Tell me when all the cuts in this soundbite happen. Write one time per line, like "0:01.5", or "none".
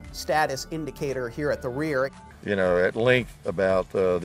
0:02.2

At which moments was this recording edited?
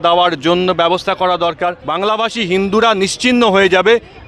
0:01.8

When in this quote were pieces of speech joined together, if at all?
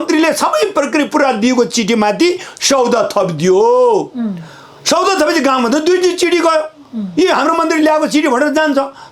none

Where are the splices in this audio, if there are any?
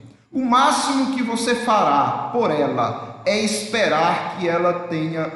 none

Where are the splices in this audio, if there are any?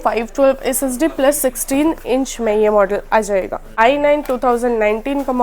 0:03.7

